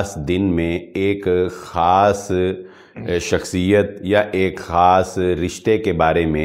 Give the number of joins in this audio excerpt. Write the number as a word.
zero